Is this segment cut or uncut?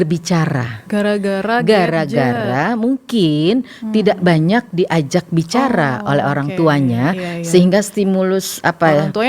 uncut